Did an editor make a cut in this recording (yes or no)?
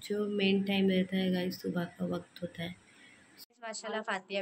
yes